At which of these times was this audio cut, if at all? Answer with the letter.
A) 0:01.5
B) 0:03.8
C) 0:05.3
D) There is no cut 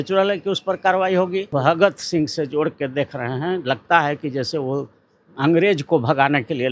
A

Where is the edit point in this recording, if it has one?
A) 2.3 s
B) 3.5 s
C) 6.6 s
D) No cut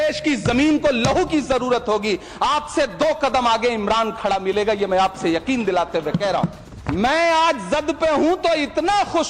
C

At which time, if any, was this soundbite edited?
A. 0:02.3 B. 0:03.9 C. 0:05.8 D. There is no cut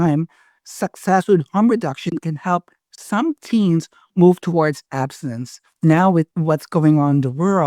C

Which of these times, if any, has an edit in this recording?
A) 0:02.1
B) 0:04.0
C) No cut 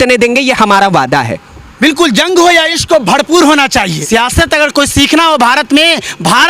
B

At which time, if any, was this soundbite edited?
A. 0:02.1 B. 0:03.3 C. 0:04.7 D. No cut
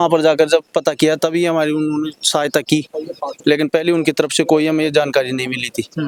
D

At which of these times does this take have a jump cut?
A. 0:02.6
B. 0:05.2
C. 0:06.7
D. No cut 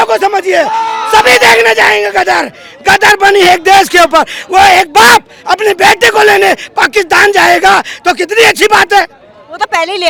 D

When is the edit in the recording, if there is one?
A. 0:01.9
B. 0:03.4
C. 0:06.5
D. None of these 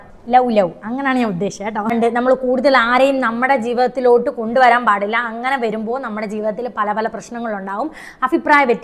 A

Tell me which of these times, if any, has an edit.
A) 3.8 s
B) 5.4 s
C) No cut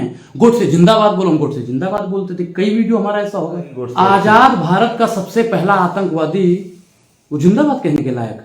A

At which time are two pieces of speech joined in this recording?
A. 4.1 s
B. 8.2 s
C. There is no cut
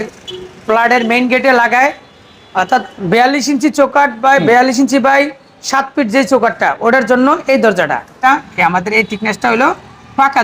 B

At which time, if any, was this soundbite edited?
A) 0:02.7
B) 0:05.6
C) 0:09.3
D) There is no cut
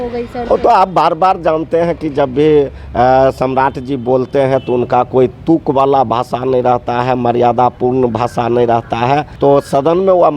C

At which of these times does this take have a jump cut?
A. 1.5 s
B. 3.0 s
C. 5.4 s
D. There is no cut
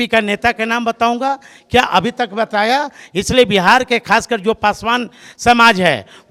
D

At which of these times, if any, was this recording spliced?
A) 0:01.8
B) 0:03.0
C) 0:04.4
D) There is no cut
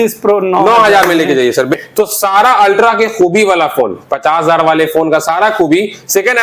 A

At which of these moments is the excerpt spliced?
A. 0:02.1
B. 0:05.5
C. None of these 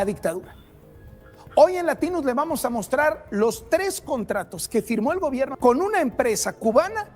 B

